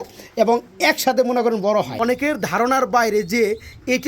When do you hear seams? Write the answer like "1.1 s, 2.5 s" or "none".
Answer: 2.2 s